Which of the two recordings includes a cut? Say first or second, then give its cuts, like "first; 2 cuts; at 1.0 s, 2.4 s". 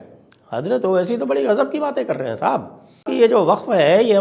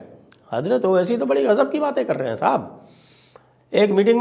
first; 1 cut; at 3.1 s